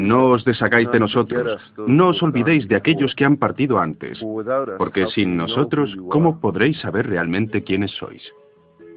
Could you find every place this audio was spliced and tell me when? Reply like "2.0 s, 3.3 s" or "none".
2.1 s